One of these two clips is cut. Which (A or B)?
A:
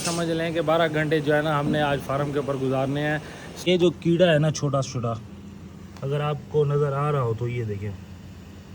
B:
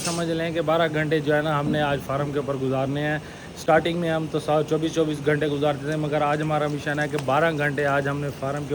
A